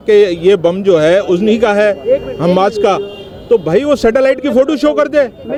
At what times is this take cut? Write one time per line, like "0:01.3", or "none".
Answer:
none